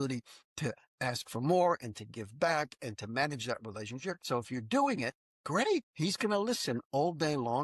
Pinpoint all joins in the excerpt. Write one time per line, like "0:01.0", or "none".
0:04.2
0:05.7